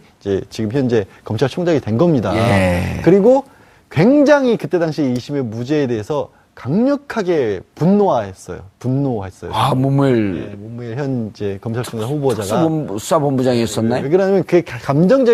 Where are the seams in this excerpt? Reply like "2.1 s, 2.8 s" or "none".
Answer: none